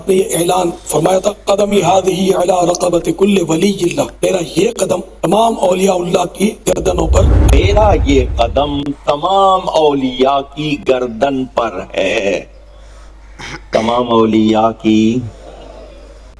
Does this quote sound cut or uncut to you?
cut